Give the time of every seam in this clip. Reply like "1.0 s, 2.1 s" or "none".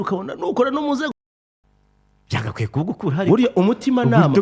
1.1 s